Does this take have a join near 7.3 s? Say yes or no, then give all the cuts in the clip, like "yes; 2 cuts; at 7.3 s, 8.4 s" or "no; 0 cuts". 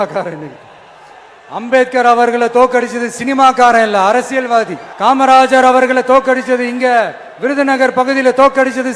no; 1 cut; at 4.8 s